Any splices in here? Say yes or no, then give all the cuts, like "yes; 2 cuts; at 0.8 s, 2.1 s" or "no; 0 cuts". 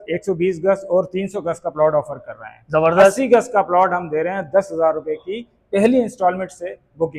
no; 0 cuts